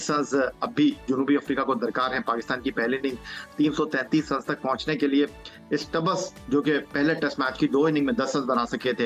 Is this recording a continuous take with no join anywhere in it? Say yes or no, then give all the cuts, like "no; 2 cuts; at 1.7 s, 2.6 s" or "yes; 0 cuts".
yes; 0 cuts